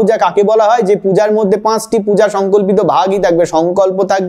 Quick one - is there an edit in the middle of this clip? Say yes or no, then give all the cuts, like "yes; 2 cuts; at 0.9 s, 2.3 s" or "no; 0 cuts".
no; 0 cuts